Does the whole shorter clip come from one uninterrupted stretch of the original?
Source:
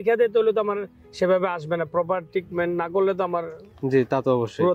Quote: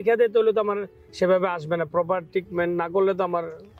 yes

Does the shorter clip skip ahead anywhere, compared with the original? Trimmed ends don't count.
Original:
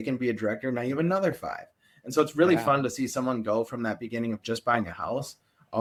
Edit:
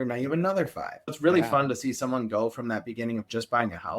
yes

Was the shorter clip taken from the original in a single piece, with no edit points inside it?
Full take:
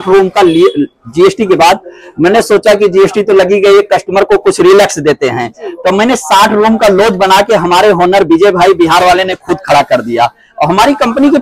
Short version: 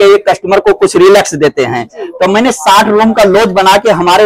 yes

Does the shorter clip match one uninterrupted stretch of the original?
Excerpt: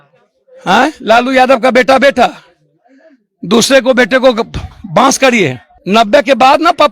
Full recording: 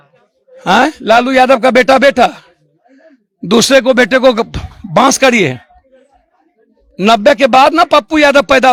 no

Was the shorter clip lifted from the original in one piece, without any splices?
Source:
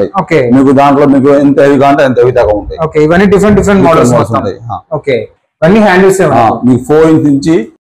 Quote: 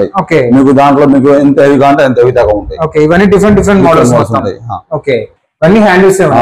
yes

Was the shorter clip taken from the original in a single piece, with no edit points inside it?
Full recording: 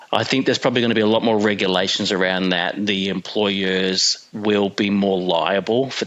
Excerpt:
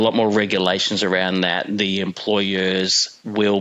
yes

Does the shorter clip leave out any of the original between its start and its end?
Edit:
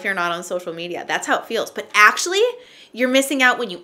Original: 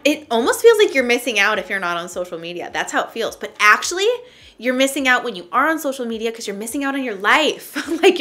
no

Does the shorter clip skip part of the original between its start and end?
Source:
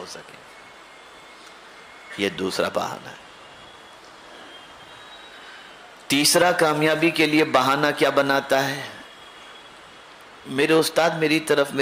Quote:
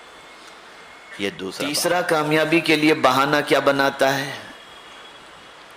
yes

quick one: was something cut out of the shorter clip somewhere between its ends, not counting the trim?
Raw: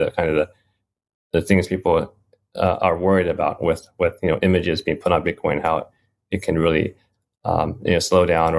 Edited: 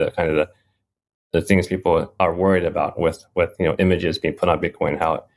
yes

